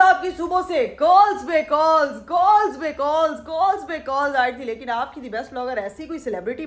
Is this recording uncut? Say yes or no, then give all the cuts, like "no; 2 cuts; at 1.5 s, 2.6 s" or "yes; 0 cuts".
yes; 0 cuts